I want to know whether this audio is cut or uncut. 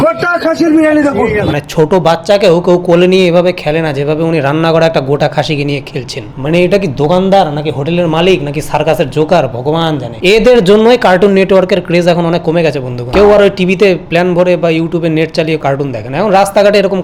uncut